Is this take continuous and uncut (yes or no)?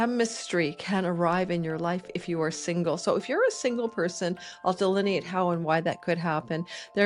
yes